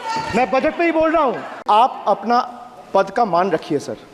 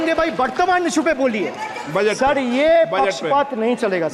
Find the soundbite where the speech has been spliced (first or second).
first